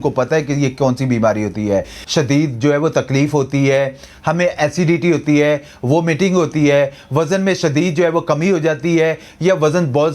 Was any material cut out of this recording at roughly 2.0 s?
yes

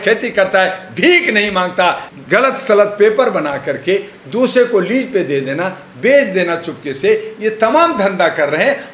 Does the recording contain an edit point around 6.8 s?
no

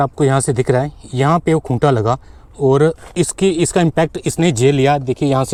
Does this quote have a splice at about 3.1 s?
no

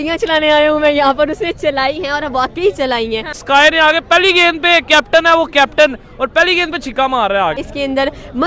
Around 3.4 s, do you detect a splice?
yes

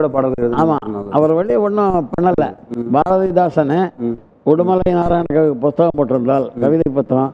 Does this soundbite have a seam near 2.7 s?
yes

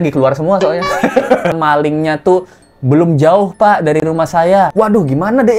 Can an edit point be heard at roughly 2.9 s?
no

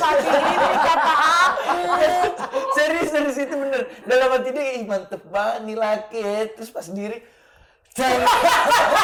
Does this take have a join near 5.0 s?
no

